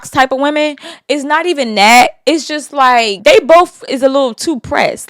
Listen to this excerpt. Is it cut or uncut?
cut